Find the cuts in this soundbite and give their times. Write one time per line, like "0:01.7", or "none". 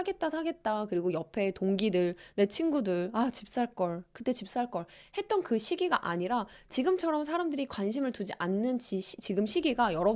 none

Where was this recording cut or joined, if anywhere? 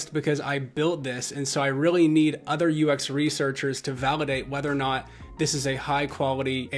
none

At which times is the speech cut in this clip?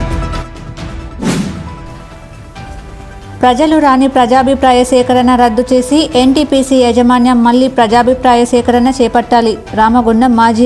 0:01.3

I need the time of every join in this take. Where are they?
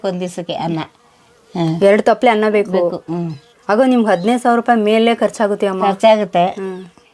none

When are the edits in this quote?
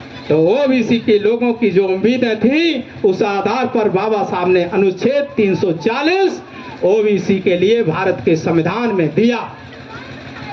none

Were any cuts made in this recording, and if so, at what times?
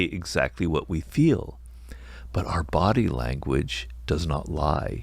none

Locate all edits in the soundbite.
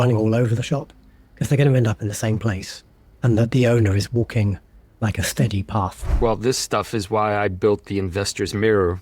0:06.1

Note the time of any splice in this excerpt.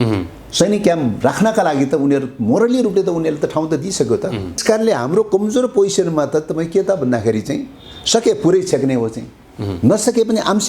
0:04.6

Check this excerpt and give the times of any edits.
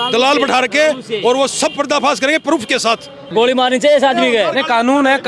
0:03.3

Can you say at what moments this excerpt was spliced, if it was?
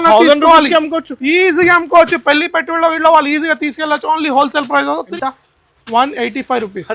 0:05.1

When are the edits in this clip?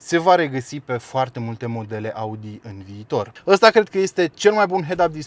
0:03.3

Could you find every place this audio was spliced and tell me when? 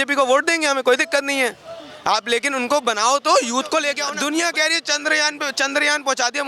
0:04.1

